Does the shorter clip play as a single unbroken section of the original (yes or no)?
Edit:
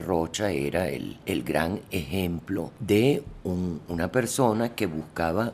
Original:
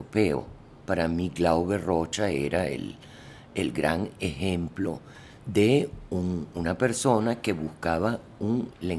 no